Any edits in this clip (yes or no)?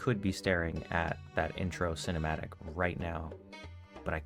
no